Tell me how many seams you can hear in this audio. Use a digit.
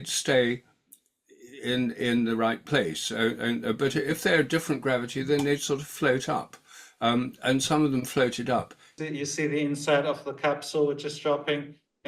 1